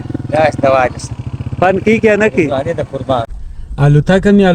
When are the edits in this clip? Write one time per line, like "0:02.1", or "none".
0:03.3